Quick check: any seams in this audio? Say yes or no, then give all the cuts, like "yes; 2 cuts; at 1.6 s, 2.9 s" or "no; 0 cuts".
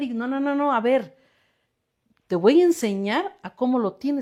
no; 0 cuts